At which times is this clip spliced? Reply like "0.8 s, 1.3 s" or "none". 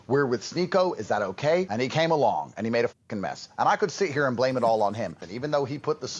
1.7 s, 5.2 s

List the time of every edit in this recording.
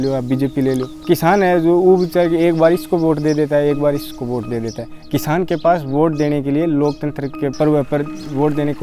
1.0 s, 7.5 s

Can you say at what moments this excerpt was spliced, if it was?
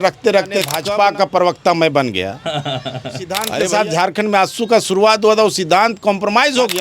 0.8 s, 3.5 s

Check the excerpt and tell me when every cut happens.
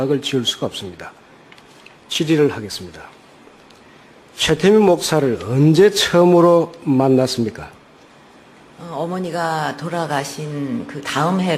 5.4 s

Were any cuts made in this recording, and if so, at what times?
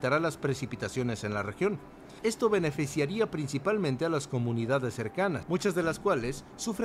5.4 s

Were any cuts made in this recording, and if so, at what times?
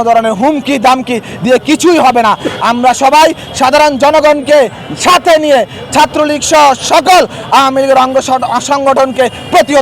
none

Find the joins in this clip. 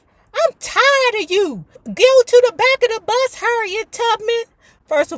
1.8 s

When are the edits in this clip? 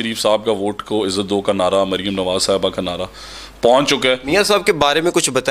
4.2 s

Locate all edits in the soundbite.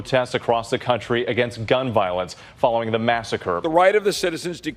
3.6 s

